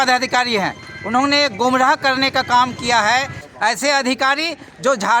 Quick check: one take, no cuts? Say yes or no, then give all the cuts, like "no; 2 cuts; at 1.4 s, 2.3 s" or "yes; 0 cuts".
no; 1 cut; at 3.4 s